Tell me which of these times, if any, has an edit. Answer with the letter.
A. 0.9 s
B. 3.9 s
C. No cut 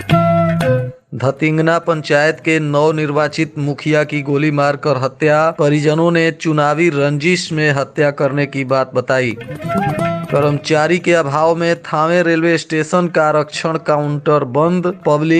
A